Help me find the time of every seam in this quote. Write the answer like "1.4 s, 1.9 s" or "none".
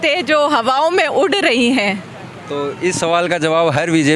none